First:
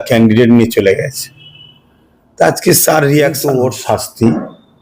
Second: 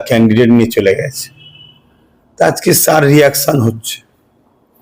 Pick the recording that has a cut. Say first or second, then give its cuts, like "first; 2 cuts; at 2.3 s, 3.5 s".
first; 1 cut; at 3.5 s